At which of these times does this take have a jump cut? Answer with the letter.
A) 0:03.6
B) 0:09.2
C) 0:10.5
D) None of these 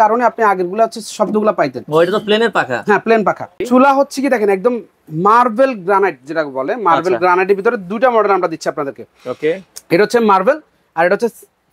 A